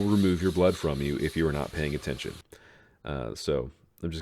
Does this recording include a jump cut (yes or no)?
yes